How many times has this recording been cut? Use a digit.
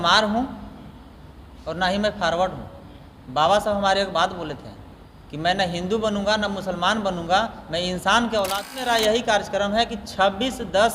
1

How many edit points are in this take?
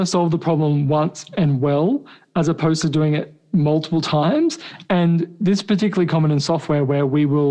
1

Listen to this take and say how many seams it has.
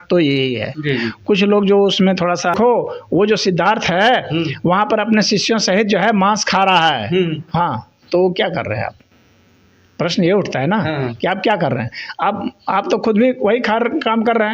1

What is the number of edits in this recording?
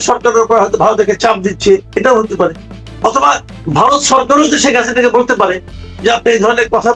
0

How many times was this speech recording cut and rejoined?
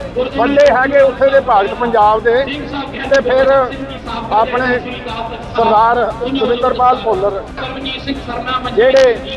1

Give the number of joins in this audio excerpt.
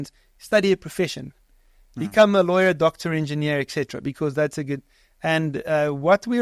0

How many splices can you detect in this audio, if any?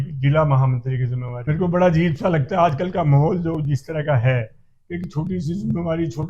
1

